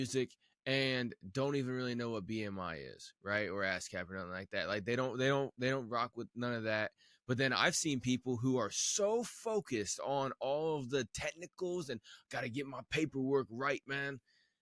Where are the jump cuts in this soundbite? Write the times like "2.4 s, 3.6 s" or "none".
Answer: none